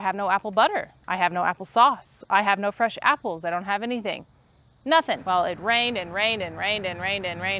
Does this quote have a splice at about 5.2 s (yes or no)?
yes